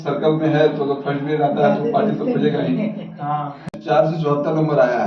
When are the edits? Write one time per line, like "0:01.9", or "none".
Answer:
0:03.8